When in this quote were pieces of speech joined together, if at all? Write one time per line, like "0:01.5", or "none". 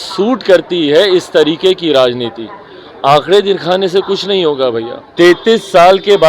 0:05.0